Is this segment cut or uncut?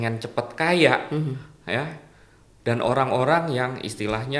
uncut